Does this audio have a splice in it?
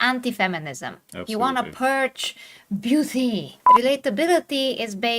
yes; 1 cut; at 3.6 s

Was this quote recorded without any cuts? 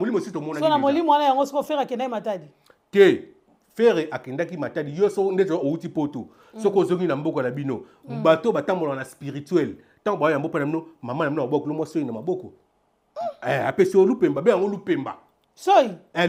yes; 0 cuts

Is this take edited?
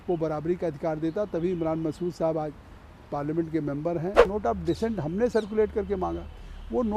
yes; 1 cut; at 4.3 s

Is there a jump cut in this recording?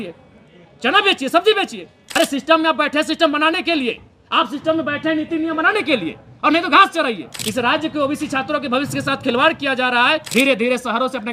yes; 3 cuts; at 2.0 s, 7.3 s, 10.3 s

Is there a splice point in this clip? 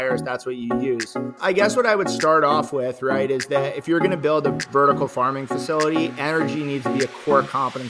yes; 1 cut; at 1.6 s

